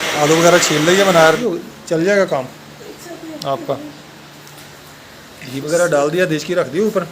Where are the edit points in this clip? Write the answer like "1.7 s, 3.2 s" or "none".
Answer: 1.4 s